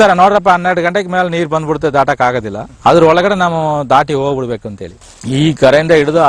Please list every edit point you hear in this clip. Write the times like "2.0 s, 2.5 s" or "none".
5.0 s